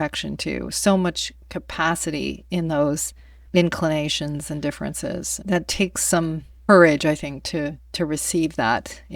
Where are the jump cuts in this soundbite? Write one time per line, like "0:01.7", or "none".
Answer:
0:05.3
0:06.5

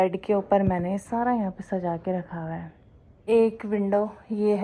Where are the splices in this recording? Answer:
0:03.1

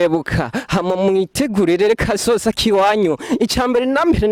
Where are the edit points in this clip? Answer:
none

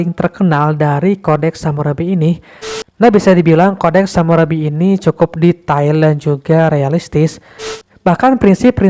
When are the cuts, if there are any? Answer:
0:02.7
0:07.6

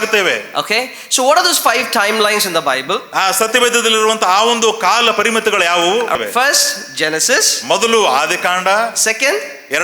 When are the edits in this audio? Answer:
0:06.2

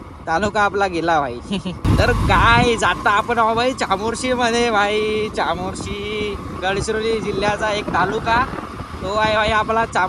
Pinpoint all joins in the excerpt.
0:01.8
0:06.5

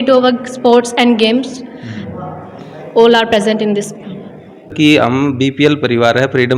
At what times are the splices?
0:04.7

